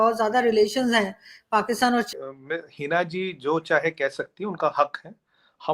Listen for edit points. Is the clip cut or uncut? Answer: cut